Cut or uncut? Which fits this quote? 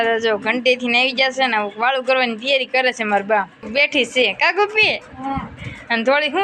cut